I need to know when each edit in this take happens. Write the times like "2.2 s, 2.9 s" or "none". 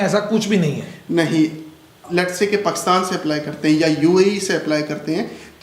1.9 s

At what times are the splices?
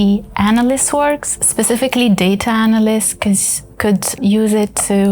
1.4 s, 4.2 s

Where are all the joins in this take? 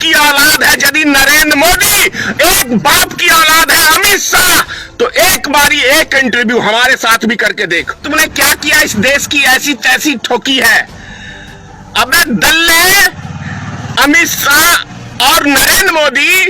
8.0 s

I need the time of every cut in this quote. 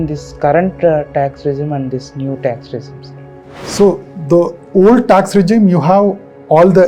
none

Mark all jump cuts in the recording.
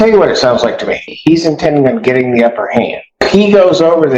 1.1 s, 3.3 s

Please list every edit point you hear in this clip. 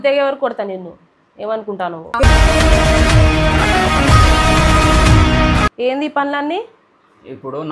none

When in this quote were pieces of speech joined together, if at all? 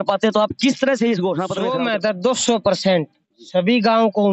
1.5 s

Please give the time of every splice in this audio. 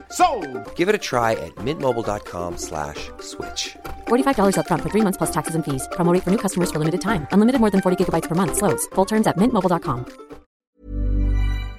10.5 s

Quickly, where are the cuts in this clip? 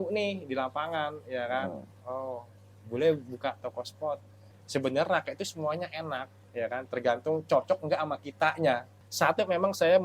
4.5 s, 9.0 s

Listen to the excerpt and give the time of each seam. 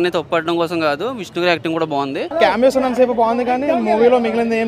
2.6 s

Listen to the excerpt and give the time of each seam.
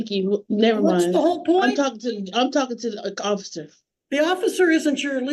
none

